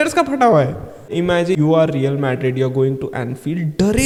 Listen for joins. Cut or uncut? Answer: uncut